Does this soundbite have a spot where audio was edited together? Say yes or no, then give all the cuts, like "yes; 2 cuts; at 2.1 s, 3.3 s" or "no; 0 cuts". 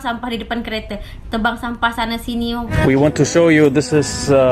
yes; 1 cut; at 2.9 s